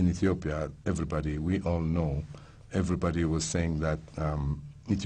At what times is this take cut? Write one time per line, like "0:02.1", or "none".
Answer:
0:03.6